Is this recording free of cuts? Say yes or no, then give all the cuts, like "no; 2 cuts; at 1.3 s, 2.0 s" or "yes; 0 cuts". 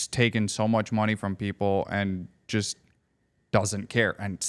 yes; 0 cuts